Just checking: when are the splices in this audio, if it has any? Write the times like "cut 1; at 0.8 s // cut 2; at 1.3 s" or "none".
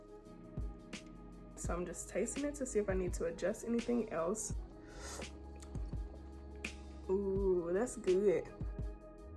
cut 1; at 1.6 s // cut 2; at 4.4 s // cut 3; at 6.8 s // cut 4; at 8.5 s